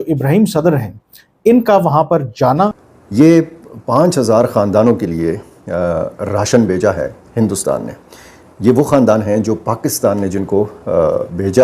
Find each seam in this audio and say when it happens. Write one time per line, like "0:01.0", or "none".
0:02.8